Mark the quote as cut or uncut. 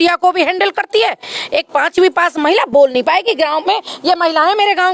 uncut